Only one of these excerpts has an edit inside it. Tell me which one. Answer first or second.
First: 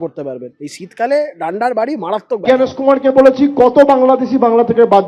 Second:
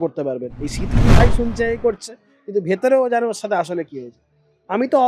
second